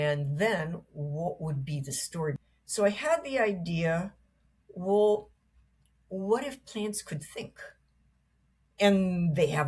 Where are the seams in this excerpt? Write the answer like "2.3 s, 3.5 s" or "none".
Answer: 2.4 s